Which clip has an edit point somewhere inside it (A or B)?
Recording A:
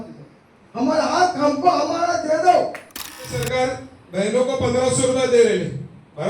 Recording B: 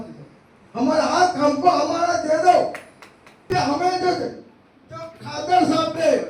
A